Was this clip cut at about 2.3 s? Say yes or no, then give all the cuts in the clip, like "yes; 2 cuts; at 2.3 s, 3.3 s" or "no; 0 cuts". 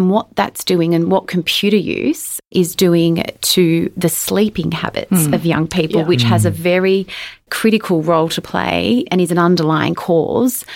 yes; 1 cut; at 2.3 s